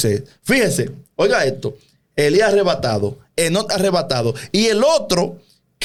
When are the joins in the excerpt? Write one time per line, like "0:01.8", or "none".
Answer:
none